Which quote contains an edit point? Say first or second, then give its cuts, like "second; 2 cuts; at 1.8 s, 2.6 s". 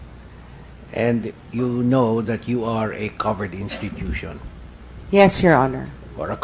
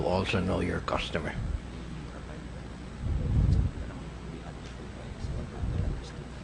first; 1 cut; at 2.2 s